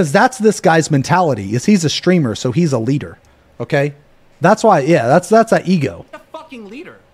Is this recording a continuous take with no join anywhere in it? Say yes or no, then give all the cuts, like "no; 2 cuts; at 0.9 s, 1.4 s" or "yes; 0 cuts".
no; 1 cut; at 4.9 s